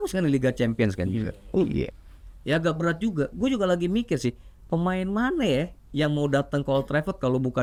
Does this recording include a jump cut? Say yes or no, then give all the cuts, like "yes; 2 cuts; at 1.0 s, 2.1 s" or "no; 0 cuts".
no; 0 cuts